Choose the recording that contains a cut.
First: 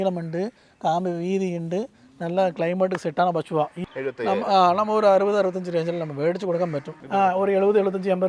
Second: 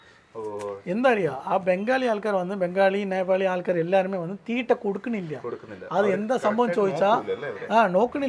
first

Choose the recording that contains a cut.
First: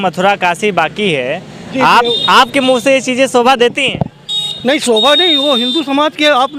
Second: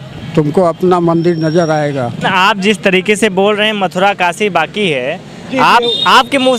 second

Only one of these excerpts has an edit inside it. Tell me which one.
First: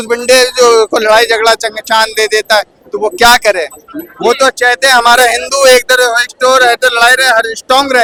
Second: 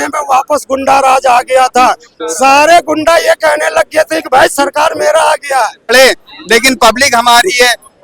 second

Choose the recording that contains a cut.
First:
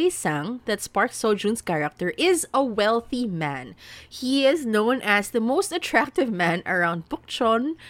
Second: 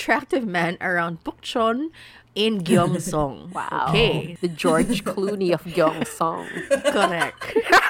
second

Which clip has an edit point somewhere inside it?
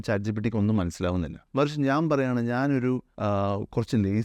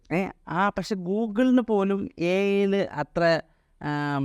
first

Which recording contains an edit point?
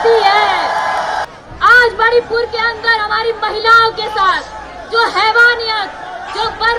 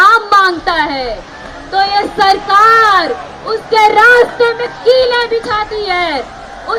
first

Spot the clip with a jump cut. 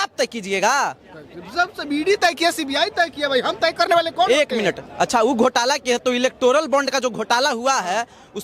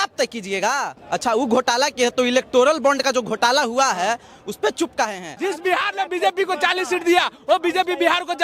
second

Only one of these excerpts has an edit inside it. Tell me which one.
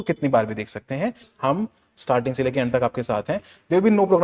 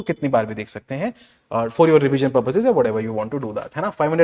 first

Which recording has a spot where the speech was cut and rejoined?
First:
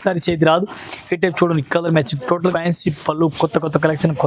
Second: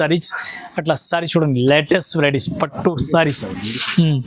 first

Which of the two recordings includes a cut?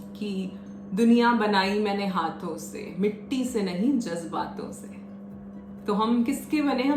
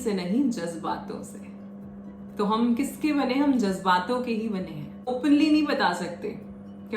second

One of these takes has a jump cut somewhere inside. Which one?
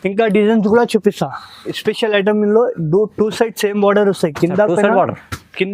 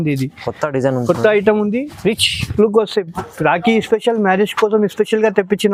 first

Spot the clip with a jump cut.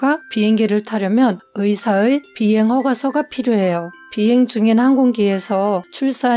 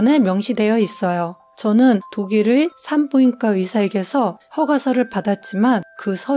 second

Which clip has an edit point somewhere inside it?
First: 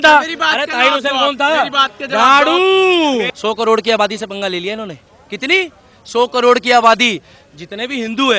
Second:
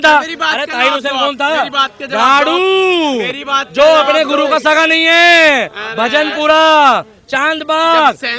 first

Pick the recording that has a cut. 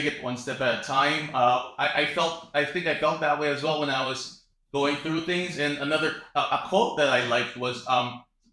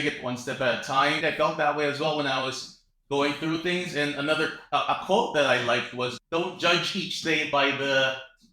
second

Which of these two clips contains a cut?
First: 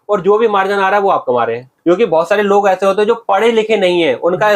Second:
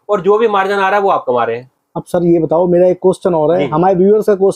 first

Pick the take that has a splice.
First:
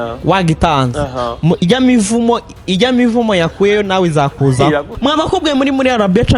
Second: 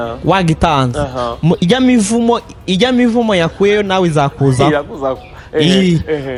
first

